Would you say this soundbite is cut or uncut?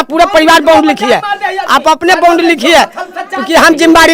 uncut